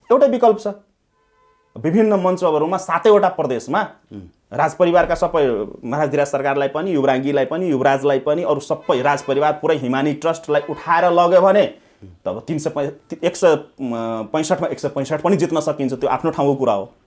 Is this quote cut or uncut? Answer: uncut